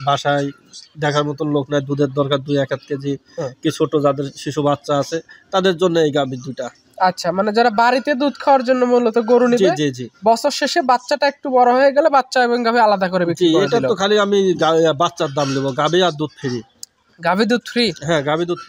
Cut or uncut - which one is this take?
uncut